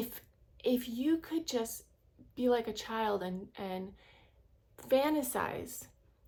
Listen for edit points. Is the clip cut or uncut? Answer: uncut